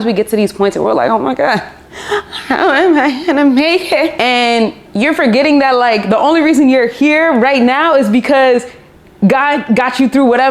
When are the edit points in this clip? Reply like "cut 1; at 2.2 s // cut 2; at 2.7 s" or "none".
none